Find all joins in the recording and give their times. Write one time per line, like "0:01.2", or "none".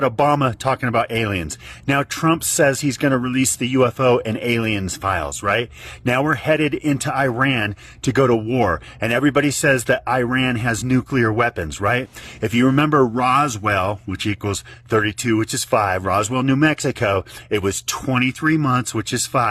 none